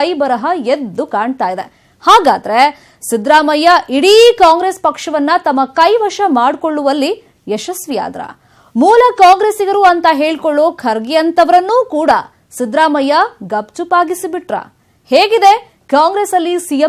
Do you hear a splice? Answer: no; 0 cuts

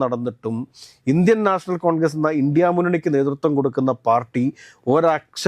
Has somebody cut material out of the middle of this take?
no; 0 cuts

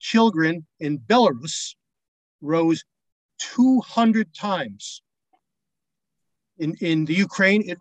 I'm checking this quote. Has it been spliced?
no; 0 cuts

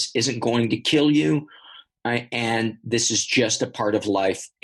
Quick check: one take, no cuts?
yes; 0 cuts

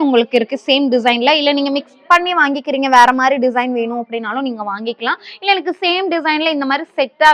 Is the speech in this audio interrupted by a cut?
no; 0 cuts

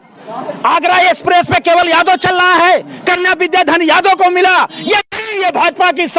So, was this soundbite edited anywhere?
no; 0 cuts

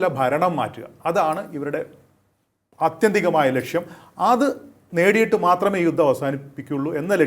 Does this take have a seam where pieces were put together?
no; 0 cuts

